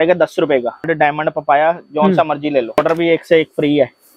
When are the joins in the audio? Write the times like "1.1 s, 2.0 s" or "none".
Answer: 0.9 s, 2.8 s